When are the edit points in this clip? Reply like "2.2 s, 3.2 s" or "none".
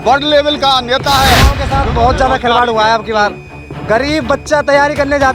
1.6 s